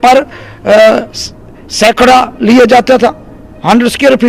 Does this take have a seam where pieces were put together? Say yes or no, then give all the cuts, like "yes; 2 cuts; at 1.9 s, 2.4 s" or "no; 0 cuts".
no; 0 cuts